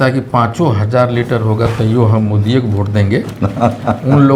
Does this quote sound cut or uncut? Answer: uncut